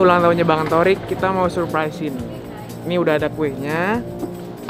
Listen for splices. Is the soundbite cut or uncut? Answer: uncut